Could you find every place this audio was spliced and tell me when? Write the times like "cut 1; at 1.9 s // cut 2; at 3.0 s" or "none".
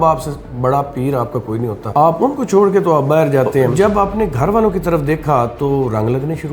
cut 1; at 1.9 s // cut 2; at 3.7 s

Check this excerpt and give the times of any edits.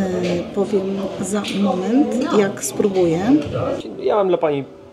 cut 1; at 3.8 s

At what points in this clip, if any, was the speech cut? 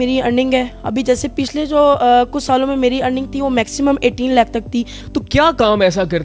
cut 1; at 5.0 s

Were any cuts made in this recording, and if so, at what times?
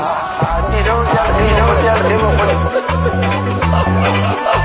none

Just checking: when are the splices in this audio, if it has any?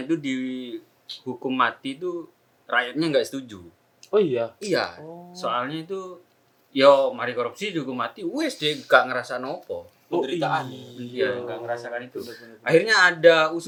none

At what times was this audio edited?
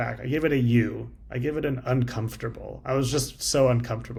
none

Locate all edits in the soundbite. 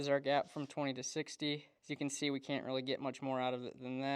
cut 1; at 1.7 s

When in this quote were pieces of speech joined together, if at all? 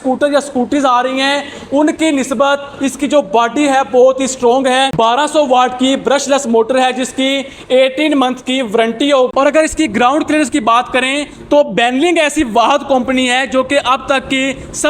cut 1; at 4.9 s // cut 2; at 9.3 s

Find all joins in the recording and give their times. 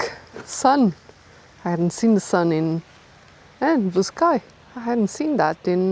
none

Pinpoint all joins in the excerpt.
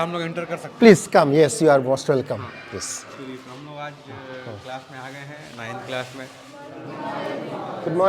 none

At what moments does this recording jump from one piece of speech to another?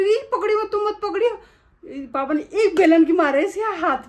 none

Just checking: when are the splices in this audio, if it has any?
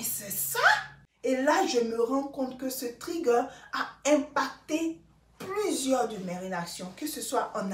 cut 1; at 1.0 s

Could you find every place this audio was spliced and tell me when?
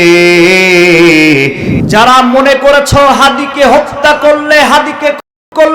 cut 1; at 1.6 s

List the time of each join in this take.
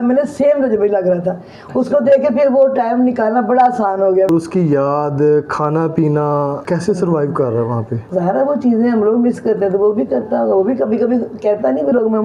cut 1; at 4.3 s // cut 2; at 6.6 s // cut 3; at 7.9 s

